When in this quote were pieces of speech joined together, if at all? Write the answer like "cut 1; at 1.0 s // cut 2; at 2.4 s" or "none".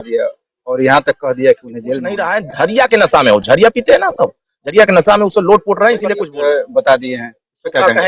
cut 1; at 2.2 s // cut 2; at 6.2 s